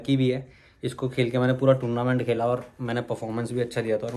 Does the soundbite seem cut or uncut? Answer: uncut